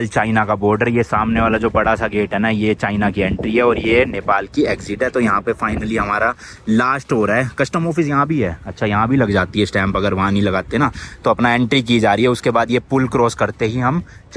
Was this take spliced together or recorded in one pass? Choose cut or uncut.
uncut